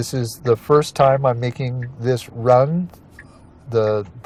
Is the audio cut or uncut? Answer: uncut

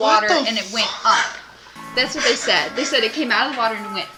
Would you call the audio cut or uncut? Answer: uncut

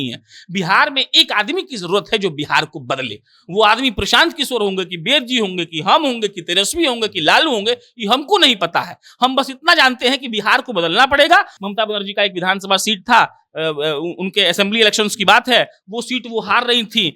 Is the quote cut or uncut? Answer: cut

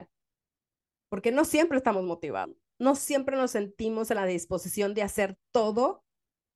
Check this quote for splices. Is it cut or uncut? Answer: cut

